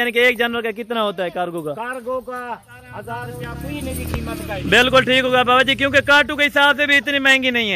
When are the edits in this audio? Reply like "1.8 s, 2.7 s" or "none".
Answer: 3.3 s

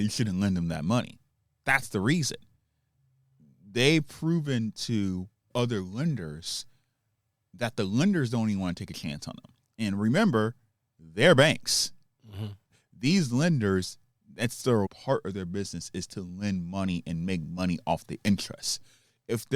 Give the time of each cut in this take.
12.8 s, 14.9 s

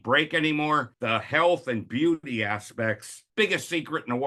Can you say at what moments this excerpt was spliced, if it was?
0.9 s, 3.1 s

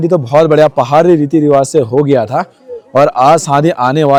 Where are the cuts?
none

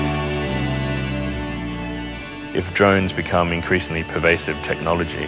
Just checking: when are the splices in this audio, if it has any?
none

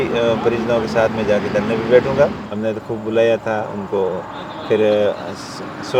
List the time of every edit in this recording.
2.4 s

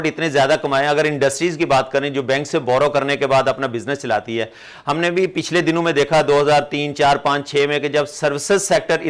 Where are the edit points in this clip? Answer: none

